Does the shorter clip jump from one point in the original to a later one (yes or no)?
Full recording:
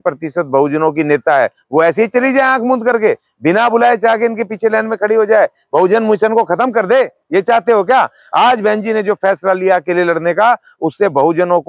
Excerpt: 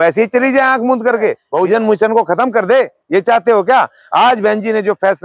yes